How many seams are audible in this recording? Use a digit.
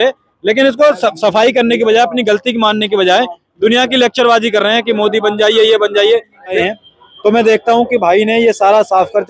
1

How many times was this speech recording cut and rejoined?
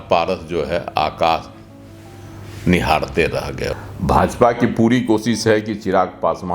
1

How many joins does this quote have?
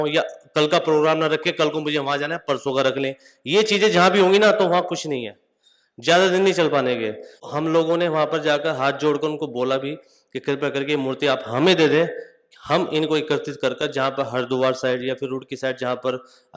1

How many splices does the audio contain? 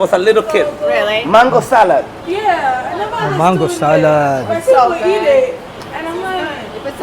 0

